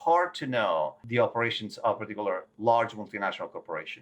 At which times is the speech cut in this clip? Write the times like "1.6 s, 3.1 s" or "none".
1.0 s, 2.5 s